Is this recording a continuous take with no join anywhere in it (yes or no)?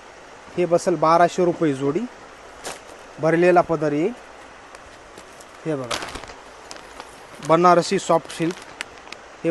yes